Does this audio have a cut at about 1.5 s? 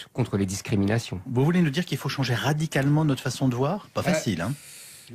yes; 1 cut; at 1.5 s

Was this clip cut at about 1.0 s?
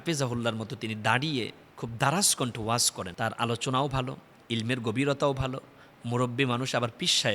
no; 1 cut; at 3.0 s

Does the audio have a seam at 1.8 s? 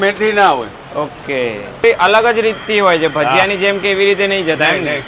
yes; 1 cut; at 1.8 s

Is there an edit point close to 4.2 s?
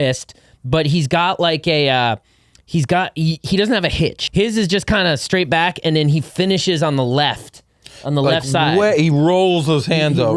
yes; 1 cut; at 4.2 s

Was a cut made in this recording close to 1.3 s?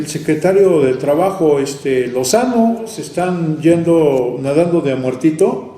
no; 1 cut; at 3.0 s

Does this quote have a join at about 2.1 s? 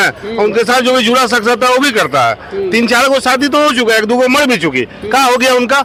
no; 0 cuts

